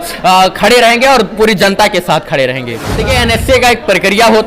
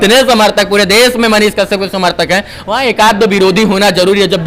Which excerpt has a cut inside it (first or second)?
first